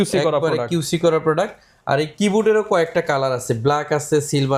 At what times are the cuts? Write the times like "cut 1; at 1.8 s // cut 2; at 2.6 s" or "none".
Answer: none